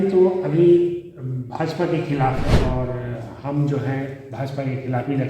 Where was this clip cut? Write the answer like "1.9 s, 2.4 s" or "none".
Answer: 2.6 s